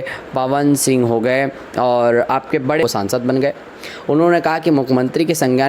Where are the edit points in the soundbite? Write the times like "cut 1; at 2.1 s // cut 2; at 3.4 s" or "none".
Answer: cut 1; at 2.8 s